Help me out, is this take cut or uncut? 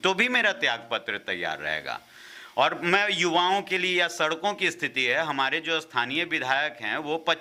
uncut